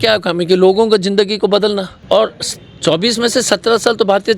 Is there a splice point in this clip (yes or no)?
yes